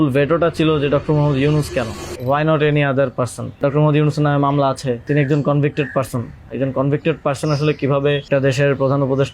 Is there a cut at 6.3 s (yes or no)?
no